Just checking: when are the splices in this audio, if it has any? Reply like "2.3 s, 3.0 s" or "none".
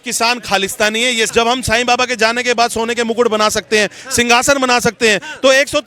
1.3 s

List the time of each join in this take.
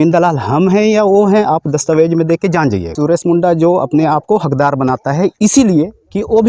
2.9 s

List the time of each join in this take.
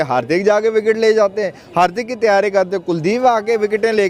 none

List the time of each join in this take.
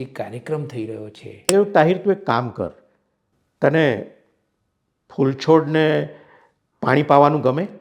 1.5 s

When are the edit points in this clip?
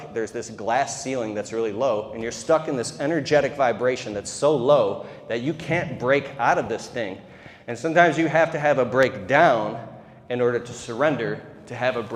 none

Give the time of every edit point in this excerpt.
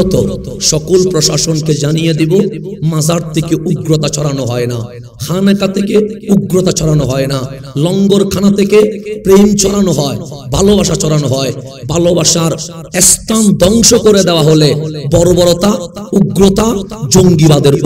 none

